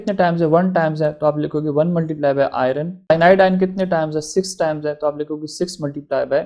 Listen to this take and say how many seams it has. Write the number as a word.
one